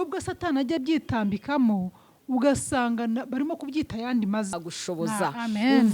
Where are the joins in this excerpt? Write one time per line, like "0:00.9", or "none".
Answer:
0:04.5